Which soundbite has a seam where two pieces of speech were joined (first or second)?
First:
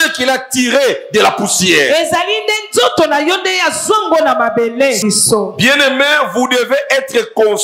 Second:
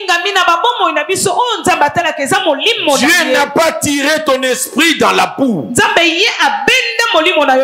first